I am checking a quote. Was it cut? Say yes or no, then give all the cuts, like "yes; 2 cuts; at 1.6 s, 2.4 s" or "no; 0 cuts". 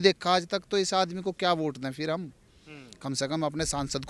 no; 0 cuts